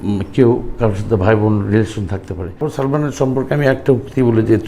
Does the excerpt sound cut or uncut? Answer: cut